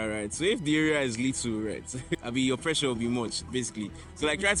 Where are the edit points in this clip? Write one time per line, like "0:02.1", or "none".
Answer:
none